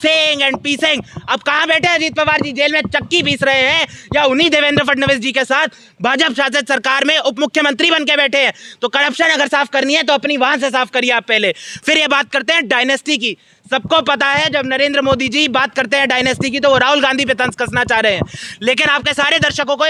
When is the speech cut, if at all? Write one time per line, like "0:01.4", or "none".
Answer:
none